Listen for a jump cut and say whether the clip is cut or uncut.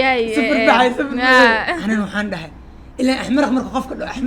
cut